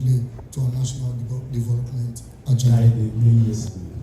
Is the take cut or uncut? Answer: cut